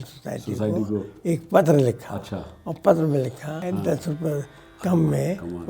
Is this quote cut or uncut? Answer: cut